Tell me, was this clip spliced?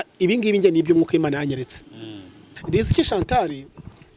yes; 1 cut; at 2.6 s

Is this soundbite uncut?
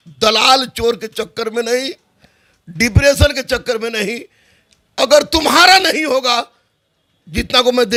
yes; 0 cuts

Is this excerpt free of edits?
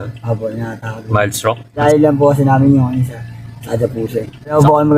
no; 1 cut; at 1.8 s

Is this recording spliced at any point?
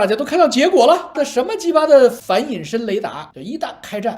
yes; 2 cuts; at 1.2 s, 3.2 s

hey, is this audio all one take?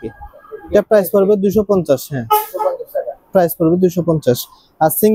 yes; 0 cuts

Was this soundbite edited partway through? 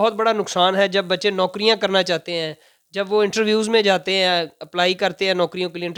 no; 0 cuts

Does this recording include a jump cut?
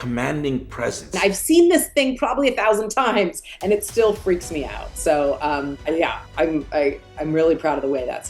yes; 2 cuts; at 1.1 s, 6.3 s

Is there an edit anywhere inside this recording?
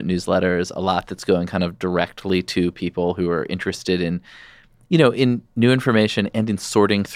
no; 0 cuts

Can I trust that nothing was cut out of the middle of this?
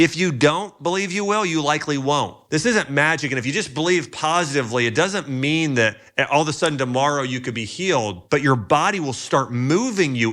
no; 2 cuts; at 2.4 s, 8.2 s

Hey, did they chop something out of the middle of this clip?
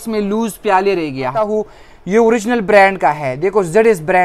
yes; 1 cut; at 1.5 s

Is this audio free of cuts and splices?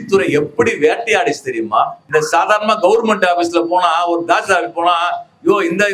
no; 1 cut; at 2.0 s

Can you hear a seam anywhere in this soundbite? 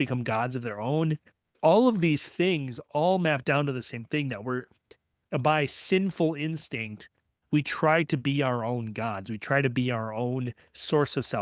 yes; 2 cuts; at 1.5 s, 5.2 s

